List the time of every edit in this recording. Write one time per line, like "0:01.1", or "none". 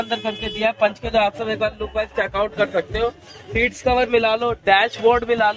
none